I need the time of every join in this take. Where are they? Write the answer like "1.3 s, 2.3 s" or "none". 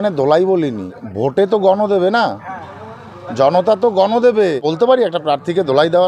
1.0 s, 4.6 s